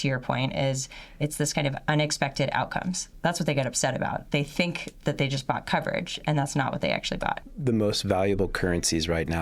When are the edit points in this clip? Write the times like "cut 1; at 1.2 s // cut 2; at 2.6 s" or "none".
cut 1; at 3.1 s // cut 2; at 7.5 s